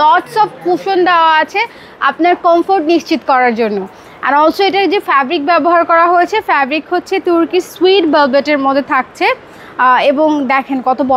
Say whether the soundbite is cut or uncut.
uncut